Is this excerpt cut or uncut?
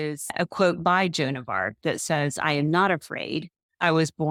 uncut